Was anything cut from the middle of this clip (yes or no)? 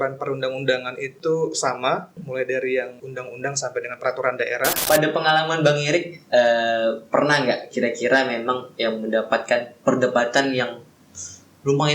yes